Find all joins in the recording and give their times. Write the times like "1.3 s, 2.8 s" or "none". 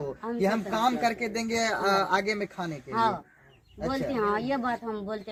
none